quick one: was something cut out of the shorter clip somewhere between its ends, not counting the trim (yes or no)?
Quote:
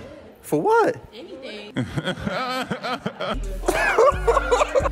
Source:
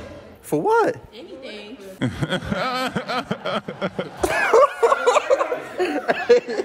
yes